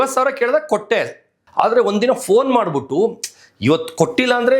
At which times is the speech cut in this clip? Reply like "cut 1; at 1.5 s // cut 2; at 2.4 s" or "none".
cut 1; at 1.3 s